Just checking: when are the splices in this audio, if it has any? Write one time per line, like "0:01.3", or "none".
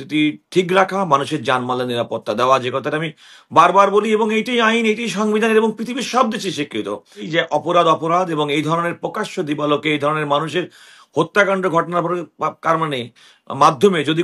0:07.2